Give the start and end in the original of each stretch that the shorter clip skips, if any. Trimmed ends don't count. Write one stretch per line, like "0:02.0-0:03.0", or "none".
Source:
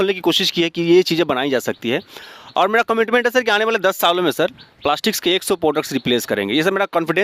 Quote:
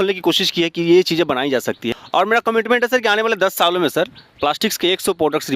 0:01.9-0:02.4

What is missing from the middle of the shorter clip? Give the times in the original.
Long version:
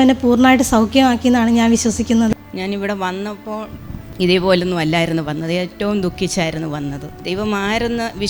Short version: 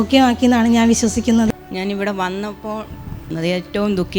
0:04.1-0:05.3

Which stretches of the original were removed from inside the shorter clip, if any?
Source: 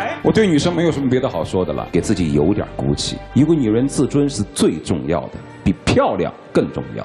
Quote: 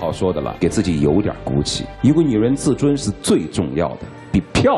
none

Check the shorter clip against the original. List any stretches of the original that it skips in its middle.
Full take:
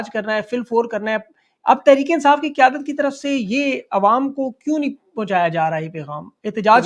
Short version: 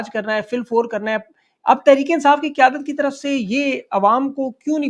none

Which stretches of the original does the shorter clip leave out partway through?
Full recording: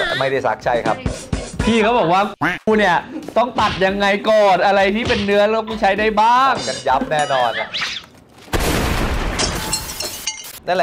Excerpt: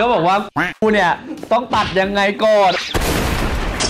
0:04.6-0:08.3

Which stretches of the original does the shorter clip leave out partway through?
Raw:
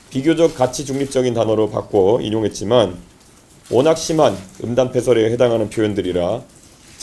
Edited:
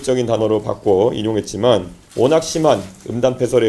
0:03.1-0:03.5

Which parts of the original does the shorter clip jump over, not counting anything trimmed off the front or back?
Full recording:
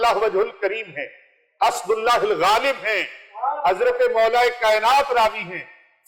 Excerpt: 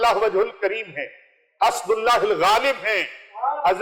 none

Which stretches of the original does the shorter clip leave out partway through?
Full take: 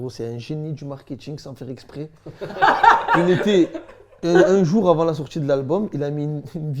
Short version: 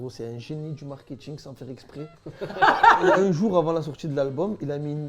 0:03.0-0:04.3

